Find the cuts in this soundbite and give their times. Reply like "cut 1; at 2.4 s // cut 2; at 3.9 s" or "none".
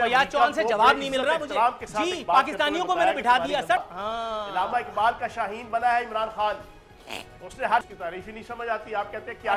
cut 1; at 3.8 s // cut 2; at 7.9 s